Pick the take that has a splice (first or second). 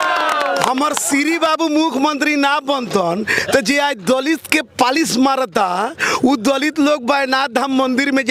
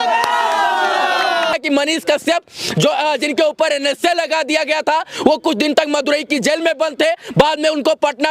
second